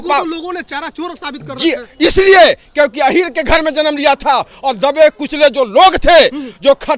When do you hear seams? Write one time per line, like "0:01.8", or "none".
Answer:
none